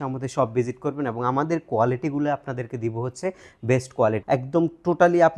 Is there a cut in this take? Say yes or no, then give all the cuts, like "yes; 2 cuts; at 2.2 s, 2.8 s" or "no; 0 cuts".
yes; 1 cut; at 4.2 s